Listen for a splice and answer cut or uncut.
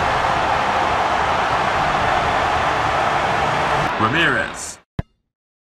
cut